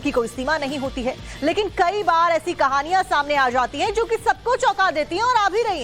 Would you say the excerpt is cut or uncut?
cut